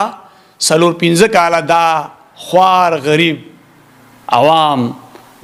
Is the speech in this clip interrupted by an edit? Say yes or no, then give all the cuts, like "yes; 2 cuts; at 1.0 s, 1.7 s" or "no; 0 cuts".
no; 0 cuts